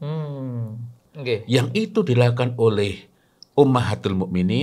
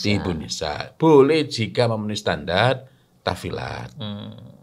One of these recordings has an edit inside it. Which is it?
first; 1 cut; at 1.1 s

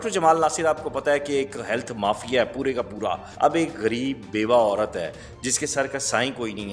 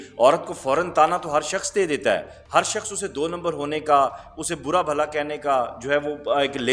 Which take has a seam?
first; 1 cut; at 3.3 s

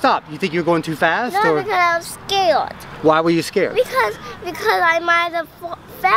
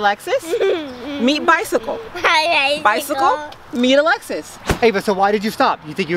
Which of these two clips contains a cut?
second; 1 cut; at 4.7 s

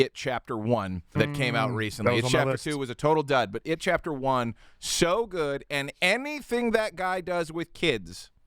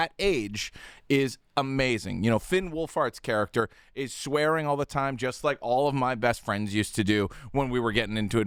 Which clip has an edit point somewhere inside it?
first; 1 cut; at 1.1 s

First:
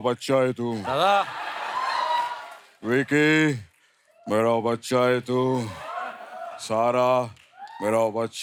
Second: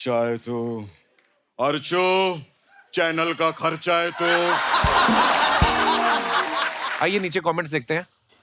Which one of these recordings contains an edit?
second; 1 cut; at 6.8 s

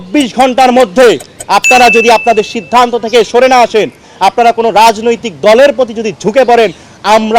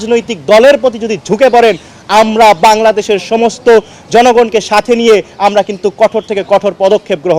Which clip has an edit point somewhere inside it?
first; 1 cut; at 4.0 s

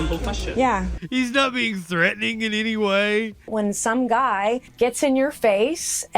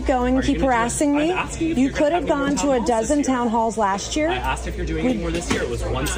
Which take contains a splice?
first; 3 cuts; at 0.9 s, 3.5 s, 4.7 s

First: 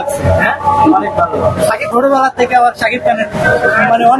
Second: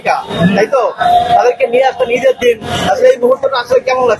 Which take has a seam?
first; 2 cuts; at 1.9 s, 3.4 s

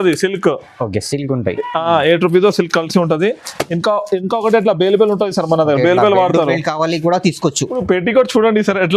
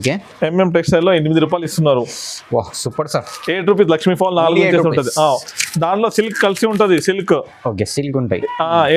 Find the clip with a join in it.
first; 1 cut; at 7.8 s

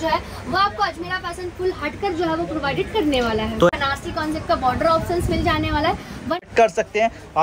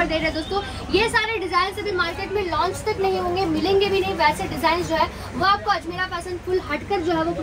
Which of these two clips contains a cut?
first; 2 cuts; at 3.7 s, 6.3 s

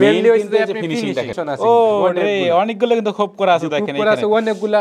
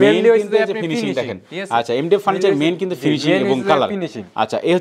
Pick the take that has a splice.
first; 1 cut; at 1.4 s

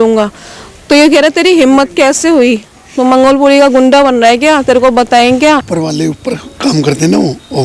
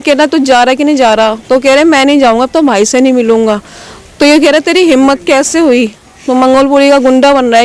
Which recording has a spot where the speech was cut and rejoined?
first; 1 cut; at 5.7 s

